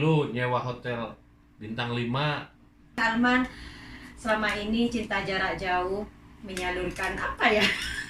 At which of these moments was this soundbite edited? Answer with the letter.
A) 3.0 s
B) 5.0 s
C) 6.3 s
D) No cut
A